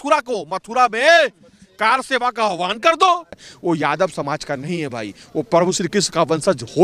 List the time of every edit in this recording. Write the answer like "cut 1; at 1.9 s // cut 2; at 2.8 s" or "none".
cut 1; at 3.4 s